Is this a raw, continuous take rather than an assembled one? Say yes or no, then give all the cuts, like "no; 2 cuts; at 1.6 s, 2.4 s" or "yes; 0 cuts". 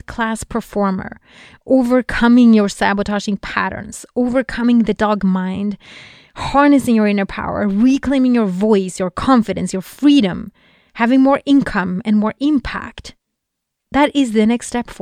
yes; 0 cuts